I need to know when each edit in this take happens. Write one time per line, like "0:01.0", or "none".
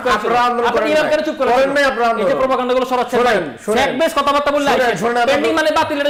none